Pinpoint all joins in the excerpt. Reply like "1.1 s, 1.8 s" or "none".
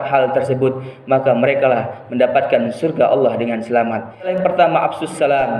4.3 s